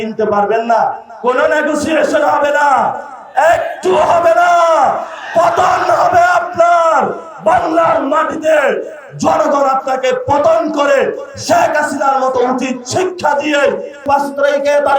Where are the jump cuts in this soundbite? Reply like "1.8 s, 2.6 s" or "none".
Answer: 14.0 s